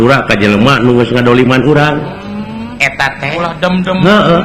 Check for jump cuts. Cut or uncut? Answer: uncut